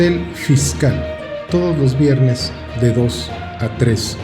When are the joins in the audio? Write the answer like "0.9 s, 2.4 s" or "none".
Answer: 1.1 s